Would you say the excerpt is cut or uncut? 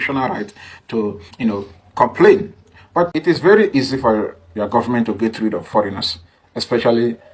cut